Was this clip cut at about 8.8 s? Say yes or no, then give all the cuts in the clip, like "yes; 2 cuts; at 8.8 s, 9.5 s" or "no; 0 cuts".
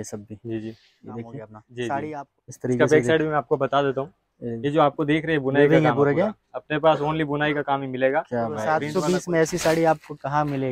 yes; 2 cuts; at 2.3 s, 8.8 s